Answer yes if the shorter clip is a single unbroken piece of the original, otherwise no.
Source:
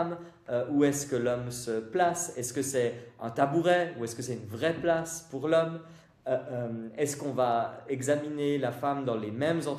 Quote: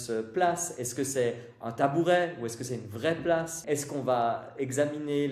no